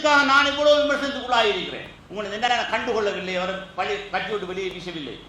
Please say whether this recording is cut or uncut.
cut